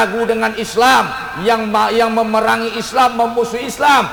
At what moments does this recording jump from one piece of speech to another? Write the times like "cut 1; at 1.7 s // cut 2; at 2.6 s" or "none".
none